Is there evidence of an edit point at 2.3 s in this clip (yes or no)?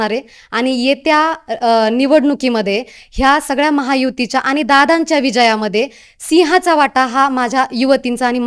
no